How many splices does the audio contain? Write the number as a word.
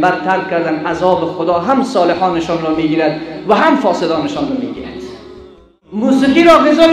one